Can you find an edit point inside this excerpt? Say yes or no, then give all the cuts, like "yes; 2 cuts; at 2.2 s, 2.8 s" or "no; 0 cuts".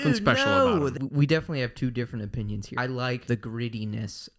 yes; 2 cuts; at 1.0 s, 2.8 s